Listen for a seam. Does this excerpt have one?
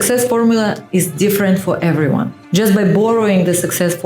yes; 1 cut; at 2.4 s

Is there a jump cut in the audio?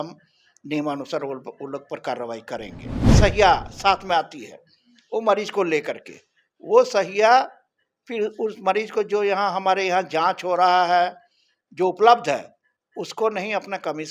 yes; 1 cut; at 3.0 s

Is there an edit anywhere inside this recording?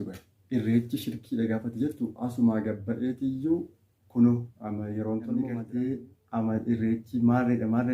yes; 1 cut; at 5.5 s

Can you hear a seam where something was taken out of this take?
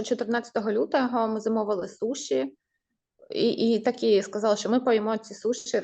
no; 0 cuts

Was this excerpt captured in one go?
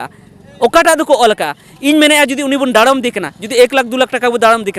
yes; 0 cuts

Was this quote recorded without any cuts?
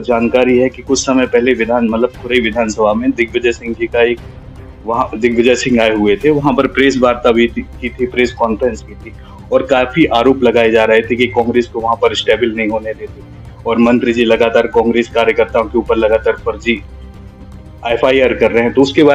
yes; 0 cuts

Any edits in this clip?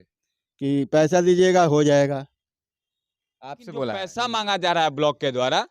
yes; 1 cut; at 4.1 s

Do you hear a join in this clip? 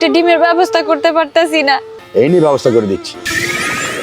yes; 1 cut; at 1.9 s

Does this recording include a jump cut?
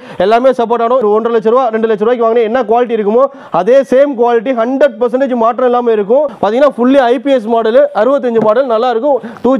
yes; 2 cuts; at 1.0 s, 6.3 s

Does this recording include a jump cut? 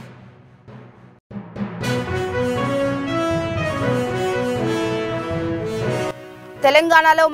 yes; 1 cut; at 6.1 s

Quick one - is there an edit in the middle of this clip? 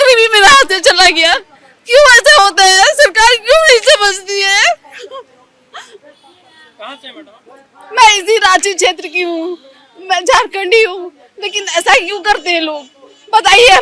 no; 0 cuts

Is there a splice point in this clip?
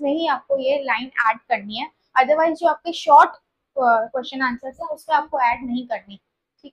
no; 0 cuts

